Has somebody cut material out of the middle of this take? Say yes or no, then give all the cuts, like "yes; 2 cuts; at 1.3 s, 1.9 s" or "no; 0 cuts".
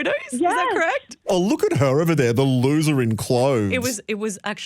yes; 2 cuts; at 1.3 s, 3.7 s